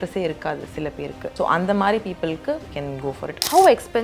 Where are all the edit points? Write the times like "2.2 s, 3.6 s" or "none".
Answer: 1.3 s, 2.9 s